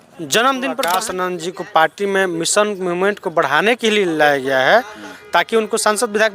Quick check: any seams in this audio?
yes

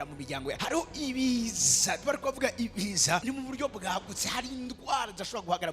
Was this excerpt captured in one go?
no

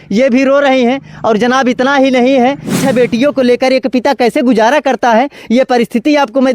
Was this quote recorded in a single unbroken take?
no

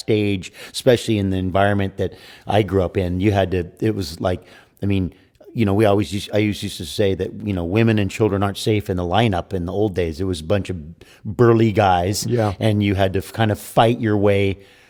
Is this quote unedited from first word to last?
yes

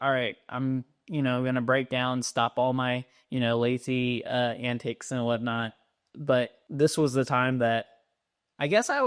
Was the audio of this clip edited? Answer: no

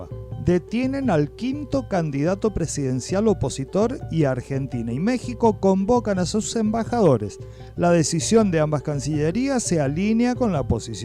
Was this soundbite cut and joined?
no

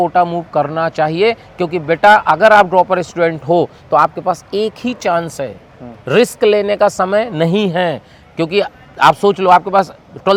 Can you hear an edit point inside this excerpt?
no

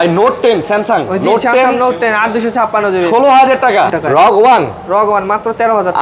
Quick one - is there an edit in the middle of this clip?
yes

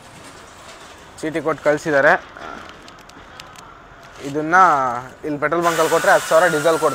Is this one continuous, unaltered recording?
yes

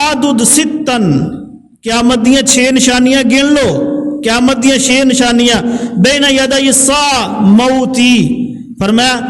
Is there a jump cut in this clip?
no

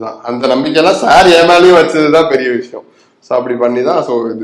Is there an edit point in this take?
no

